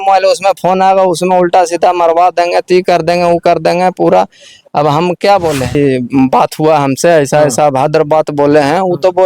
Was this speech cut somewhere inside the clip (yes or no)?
yes